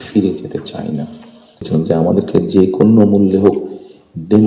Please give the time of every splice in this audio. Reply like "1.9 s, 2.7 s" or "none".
1.6 s